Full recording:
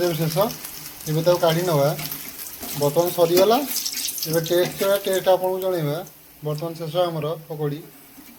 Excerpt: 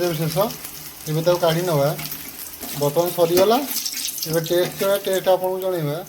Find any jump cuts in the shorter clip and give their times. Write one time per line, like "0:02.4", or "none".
none